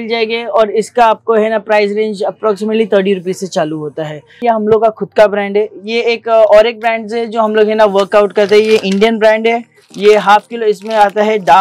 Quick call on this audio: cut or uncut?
cut